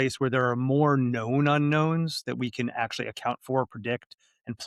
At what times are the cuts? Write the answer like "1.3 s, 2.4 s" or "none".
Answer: none